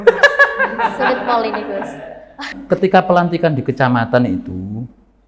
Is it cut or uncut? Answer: cut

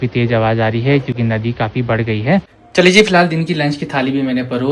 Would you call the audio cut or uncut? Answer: cut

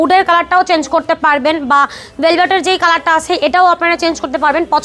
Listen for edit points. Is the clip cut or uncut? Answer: uncut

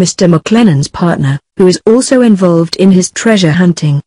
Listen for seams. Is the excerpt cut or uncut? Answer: uncut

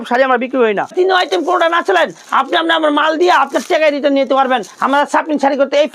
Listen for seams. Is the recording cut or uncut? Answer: cut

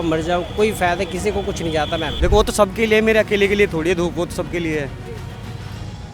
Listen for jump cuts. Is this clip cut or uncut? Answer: cut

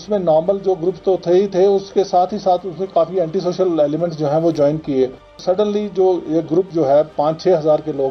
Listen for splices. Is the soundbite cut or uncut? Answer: cut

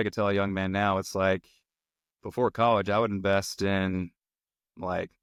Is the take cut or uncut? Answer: uncut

